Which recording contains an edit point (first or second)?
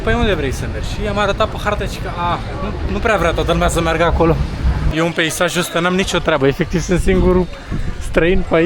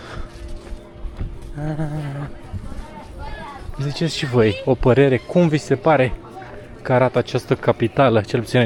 first